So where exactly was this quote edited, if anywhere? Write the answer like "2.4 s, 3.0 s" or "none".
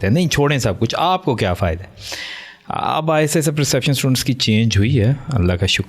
none